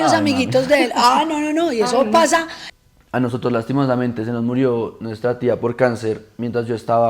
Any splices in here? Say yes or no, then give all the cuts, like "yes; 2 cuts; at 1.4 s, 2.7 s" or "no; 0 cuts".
yes; 1 cut; at 2.6 s